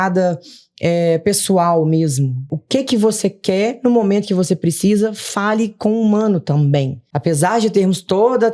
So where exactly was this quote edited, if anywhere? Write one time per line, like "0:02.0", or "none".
0:02.5
0:07.0